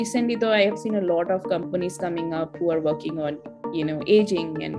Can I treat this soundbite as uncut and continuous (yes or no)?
yes